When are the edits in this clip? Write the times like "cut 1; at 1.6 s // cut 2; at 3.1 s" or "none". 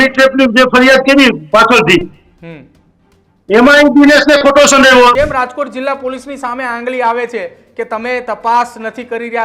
cut 1; at 5.1 s